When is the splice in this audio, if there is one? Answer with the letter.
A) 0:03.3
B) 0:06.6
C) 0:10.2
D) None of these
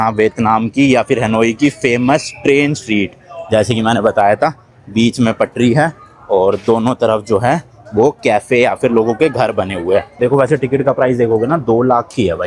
C